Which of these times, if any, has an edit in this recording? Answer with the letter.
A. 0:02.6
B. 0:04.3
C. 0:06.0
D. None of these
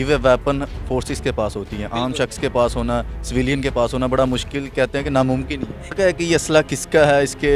C